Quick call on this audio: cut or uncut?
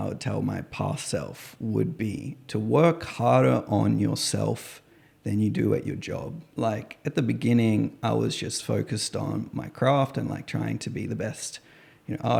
uncut